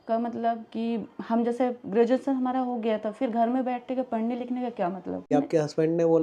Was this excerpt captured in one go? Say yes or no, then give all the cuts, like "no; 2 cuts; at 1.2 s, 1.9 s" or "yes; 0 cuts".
no; 1 cut; at 5.3 s